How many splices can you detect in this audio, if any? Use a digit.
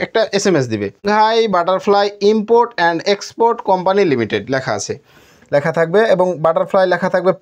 1